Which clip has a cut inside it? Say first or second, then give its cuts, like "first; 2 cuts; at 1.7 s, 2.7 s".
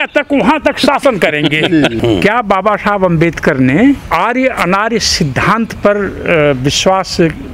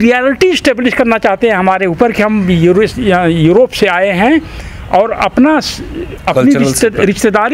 first; 2 cuts; at 2.0 s, 4.0 s